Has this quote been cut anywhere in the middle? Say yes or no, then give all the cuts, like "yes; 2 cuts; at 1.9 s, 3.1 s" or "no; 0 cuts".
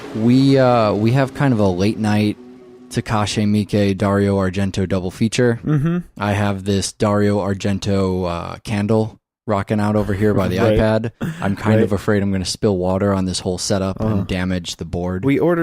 yes; 1 cut; at 10.6 s